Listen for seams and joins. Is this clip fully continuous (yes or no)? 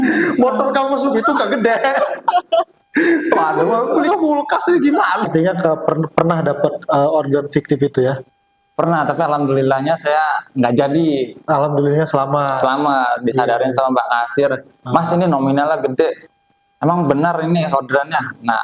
no